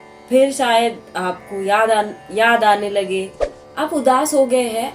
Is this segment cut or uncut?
cut